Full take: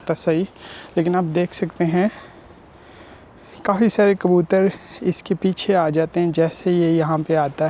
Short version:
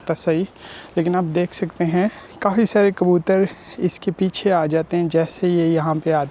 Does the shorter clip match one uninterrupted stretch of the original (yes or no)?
no